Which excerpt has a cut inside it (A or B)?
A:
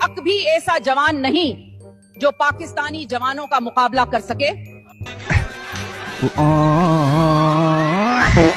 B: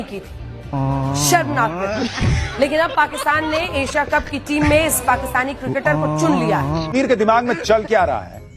B